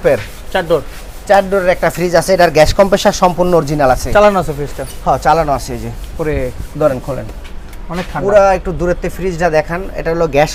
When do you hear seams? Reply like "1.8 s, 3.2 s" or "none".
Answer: none